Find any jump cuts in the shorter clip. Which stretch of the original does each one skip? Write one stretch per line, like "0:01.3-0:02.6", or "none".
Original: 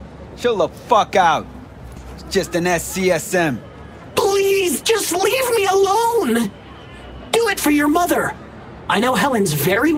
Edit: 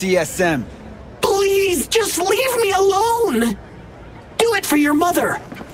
none